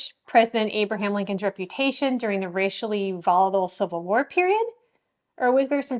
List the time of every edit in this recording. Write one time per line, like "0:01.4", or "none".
none